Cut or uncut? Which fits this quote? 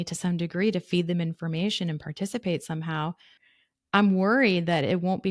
cut